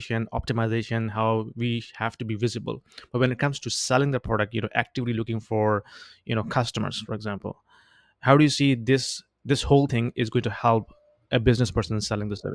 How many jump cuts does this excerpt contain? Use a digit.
0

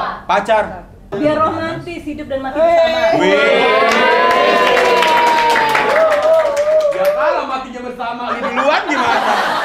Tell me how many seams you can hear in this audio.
1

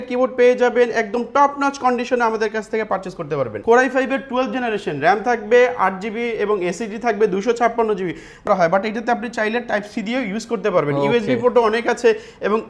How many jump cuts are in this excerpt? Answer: 2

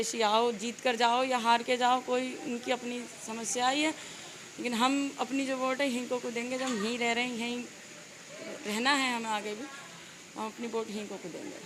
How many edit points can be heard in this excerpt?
0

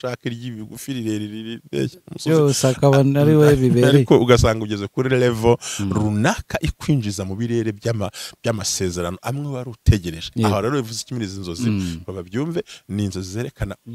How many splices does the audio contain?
0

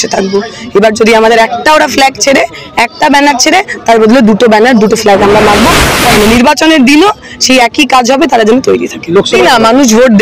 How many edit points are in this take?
2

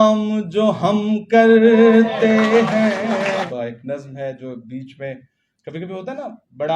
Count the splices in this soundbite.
1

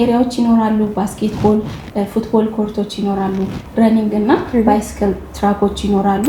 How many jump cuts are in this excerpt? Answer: 0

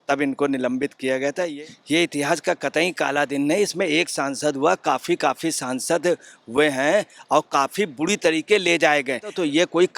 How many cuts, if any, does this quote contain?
1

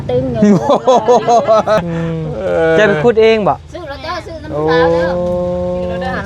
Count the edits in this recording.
1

